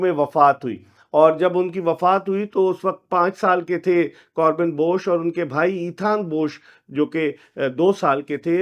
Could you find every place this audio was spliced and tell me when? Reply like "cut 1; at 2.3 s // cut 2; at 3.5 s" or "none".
none